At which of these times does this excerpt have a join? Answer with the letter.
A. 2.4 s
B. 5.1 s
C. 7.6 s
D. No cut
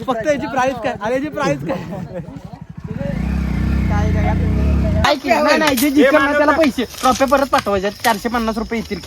B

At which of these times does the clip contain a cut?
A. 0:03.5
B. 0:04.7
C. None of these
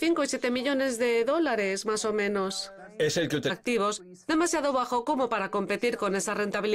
C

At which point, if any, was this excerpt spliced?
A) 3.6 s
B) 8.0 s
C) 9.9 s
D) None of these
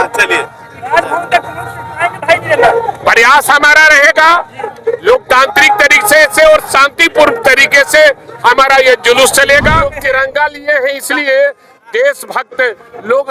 C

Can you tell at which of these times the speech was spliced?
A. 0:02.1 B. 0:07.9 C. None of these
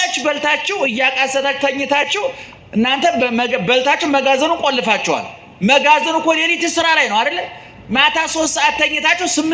C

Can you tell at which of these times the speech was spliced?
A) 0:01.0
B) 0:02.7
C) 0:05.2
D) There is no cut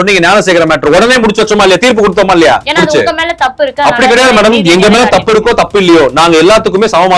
B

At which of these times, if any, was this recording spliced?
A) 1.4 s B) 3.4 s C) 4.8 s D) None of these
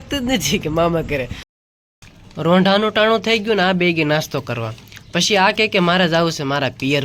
A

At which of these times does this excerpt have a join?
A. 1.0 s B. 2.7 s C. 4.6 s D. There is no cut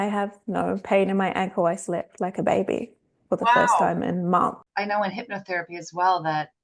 C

